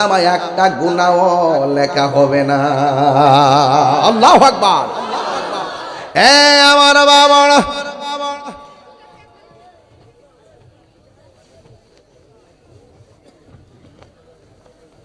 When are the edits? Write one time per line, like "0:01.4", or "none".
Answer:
none

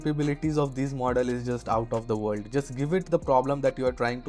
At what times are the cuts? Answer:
none

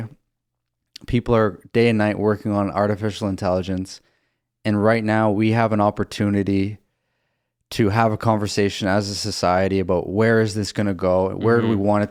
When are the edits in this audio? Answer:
none

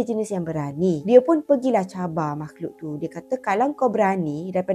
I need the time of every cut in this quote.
0:01.0

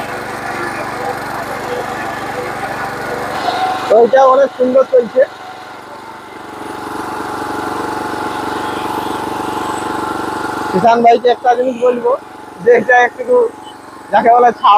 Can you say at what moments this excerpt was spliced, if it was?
0:03.3

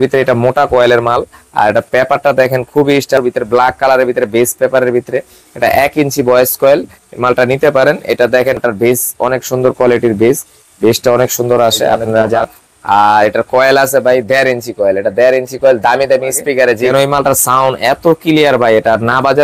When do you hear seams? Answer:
0:03.2
0:08.6
0:12.4
0:16.8

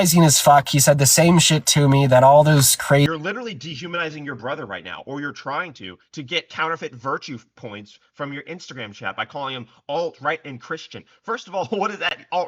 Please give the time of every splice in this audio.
0:03.0

